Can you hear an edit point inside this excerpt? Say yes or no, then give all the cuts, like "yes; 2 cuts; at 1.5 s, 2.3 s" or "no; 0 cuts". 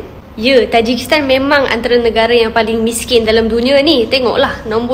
no; 0 cuts